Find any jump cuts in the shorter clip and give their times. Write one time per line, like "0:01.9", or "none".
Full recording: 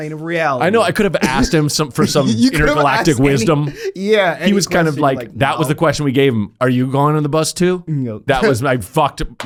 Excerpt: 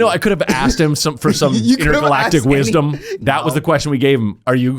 0:03.1